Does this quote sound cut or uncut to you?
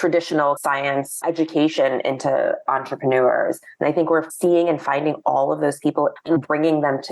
cut